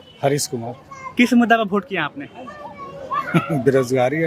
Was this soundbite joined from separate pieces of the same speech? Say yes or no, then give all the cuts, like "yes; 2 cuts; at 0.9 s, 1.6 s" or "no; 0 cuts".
no; 0 cuts